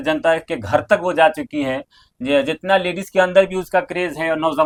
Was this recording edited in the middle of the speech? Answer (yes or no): no